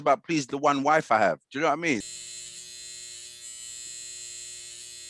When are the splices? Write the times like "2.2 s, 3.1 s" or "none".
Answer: 2.1 s